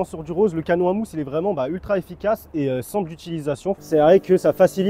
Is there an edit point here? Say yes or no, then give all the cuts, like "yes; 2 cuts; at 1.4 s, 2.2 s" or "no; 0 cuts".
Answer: yes; 1 cut; at 3.8 s